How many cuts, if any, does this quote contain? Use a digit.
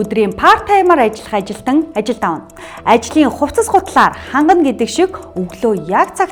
0